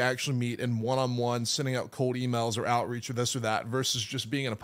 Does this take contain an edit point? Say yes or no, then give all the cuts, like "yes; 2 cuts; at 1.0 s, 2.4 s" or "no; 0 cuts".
no; 0 cuts